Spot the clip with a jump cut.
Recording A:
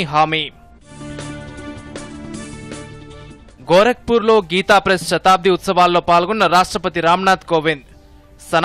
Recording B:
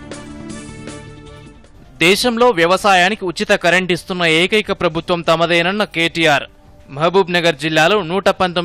B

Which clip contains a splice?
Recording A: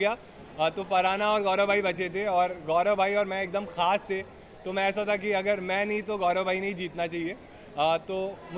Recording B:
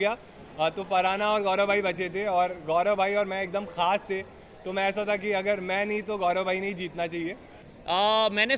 B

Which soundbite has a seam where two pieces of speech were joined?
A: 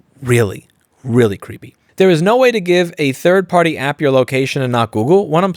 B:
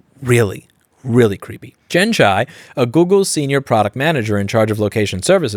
A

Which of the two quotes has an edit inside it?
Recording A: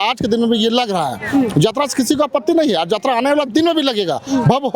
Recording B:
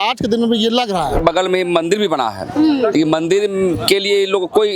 B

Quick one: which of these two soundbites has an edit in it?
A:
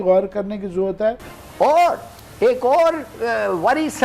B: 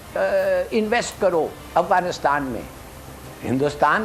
A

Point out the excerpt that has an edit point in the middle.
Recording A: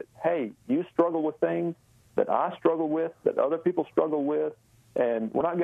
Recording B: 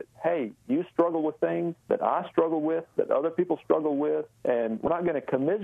B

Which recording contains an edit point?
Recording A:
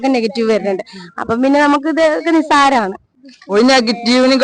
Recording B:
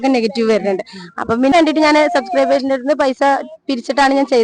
B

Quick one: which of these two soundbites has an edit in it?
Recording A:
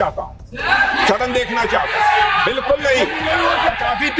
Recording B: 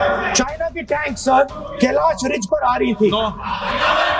B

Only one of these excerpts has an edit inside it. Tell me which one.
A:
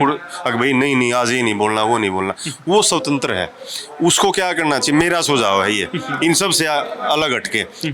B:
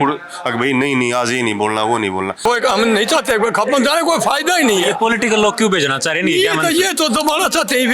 B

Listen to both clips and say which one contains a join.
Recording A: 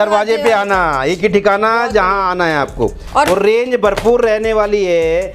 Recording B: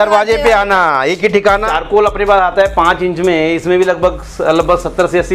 B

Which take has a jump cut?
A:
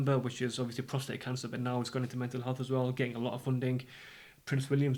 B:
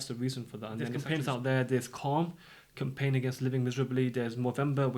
B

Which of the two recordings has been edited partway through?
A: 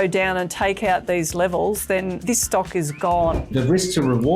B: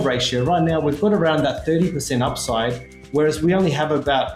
A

